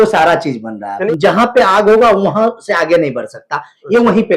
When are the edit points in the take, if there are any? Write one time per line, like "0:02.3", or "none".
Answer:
0:01.0